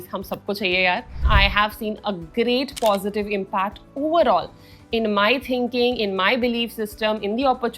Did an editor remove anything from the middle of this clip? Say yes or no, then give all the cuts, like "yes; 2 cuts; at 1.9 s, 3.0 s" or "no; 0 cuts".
yes; 1 cut; at 1.2 s